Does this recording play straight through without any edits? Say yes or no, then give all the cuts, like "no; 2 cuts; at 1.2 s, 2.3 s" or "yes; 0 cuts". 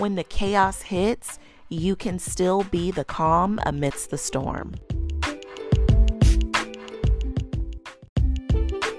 no; 2 cuts; at 4.8 s, 8.0 s